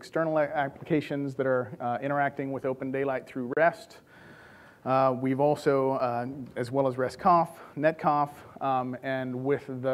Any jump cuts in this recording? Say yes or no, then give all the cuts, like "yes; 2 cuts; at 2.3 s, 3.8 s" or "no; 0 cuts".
yes; 1 cut; at 1.2 s